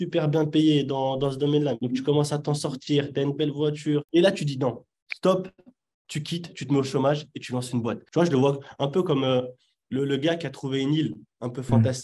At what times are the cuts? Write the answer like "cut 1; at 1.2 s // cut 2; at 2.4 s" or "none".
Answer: cut 1; at 1.8 s // cut 2; at 4.1 s // cut 3; at 8.0 s